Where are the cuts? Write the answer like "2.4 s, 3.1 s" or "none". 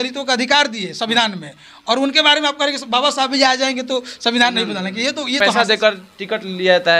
5.5 s